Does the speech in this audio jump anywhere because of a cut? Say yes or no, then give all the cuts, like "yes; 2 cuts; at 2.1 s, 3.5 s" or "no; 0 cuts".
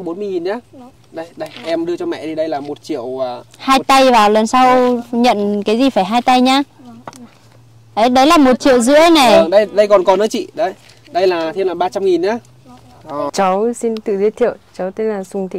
yes; 1 cut; at 13.3 s